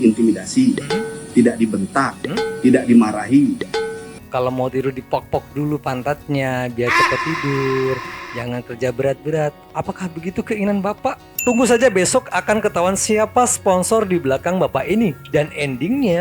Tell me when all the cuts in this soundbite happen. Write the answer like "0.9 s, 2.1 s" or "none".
3.7 s, 11.3 s